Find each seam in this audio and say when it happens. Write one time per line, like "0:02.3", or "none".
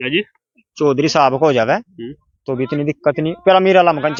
none